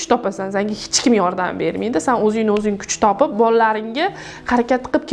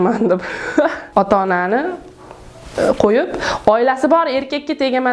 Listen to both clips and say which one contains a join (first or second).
second